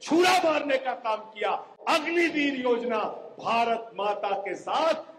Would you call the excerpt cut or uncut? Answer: uncut